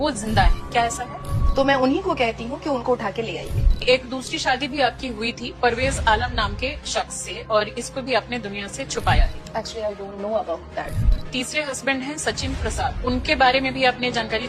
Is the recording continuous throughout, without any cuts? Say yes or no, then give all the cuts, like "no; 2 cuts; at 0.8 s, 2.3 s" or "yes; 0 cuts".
yes; 0 cuts